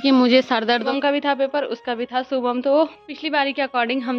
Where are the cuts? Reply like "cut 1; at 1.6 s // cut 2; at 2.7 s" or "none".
cut 1; at 0.8 s // cut 2; at 3.2 s

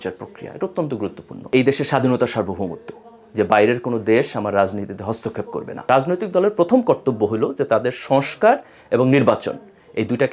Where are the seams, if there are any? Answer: cut 1; at 1.3 s // cut 2; at 5.8 s

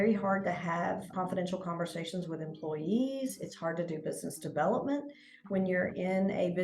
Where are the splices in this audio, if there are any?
cut 1; at 1.1 s

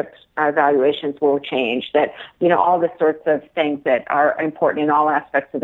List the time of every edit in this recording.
none

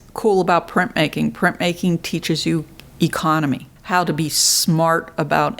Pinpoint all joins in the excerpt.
cut 1; at 3.7 s

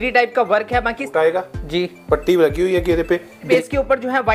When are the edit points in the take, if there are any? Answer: cut 1; at 1.0 s // cut 2; at 3.5 s

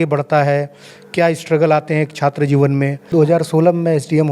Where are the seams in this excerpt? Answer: cut 1; at 3.1 s

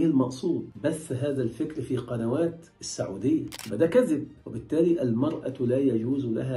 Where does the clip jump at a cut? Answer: cut 1; at 3.6 s

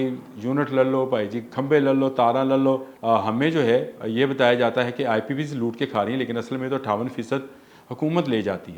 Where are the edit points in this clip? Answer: cut 1; at 2.9 s

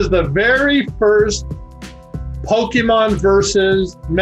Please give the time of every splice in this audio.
none

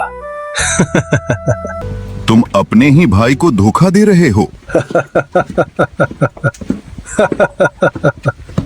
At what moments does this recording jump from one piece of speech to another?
cut 1; at 1.8 s

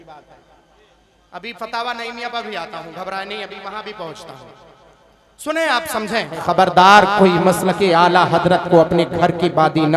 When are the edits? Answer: cut 1; at 6.3 s

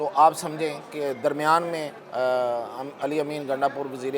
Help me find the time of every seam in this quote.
cut 1; at 2.0 s

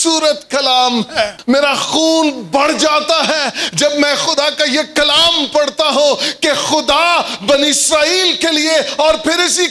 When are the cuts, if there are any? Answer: cut 1; at 1.4 s

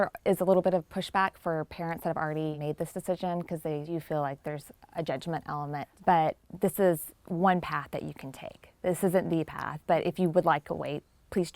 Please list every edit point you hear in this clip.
cut 1; at 2.6 s // cut 2; at 3.9 s // cut 3; at 5.9 s // cut 4; at 6.5 s

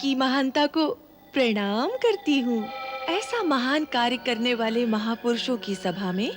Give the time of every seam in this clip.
cut 1; at 3.0 s

